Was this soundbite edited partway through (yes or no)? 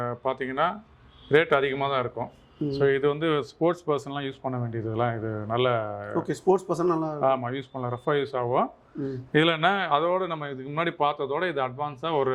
no